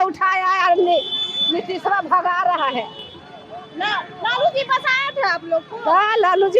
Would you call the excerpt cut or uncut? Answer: uncut